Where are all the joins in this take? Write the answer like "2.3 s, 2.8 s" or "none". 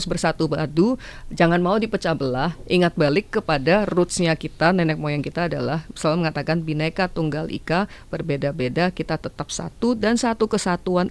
none

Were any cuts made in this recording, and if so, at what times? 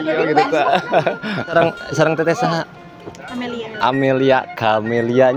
1.5 s

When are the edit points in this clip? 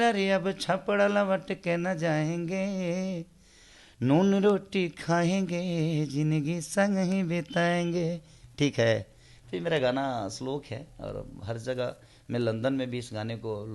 none

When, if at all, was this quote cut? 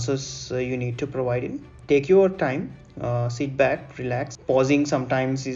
1.7 s, 4.3 s

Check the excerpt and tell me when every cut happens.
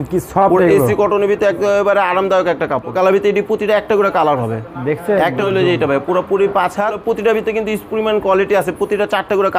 2.9 s, 5.4 s, 7.0 s

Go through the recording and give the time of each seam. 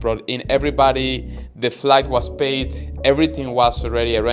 none

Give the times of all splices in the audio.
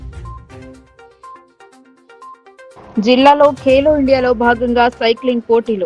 1.5 s, 2.7 s

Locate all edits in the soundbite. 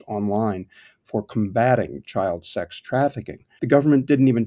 3.4 s

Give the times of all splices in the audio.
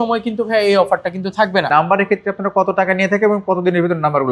1.7 s

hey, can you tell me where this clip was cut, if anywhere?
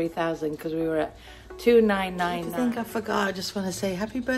2.4 s

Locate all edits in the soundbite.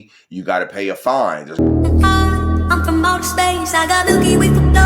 1.4 s

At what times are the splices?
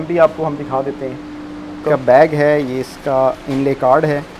1.8 s

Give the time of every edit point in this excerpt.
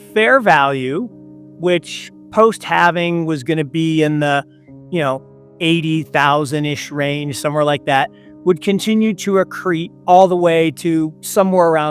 9.9 s

